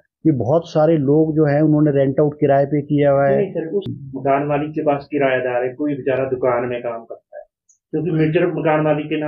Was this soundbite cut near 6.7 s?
no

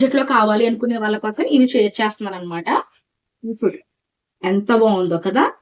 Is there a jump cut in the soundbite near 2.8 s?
no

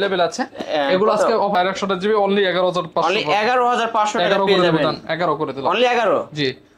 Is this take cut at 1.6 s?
yes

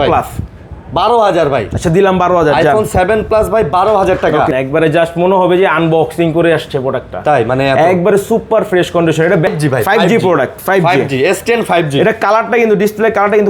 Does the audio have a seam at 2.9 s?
no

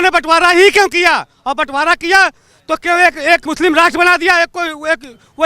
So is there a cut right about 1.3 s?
no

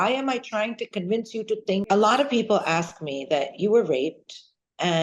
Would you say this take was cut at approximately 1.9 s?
yes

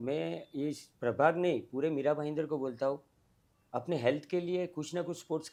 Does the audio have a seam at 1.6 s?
no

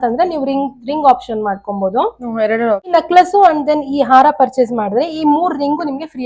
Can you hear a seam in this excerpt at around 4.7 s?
no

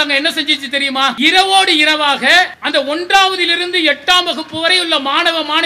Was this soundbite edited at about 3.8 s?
no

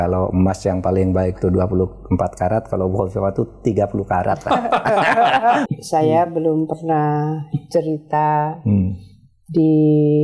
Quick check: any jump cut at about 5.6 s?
yes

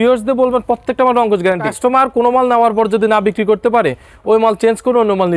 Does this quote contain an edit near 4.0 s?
no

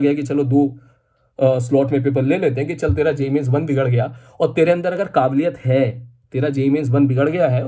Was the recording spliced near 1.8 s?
no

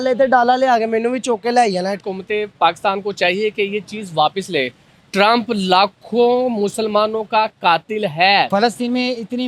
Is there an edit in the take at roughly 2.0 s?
yes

